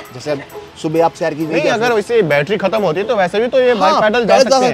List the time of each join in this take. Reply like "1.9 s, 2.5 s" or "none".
none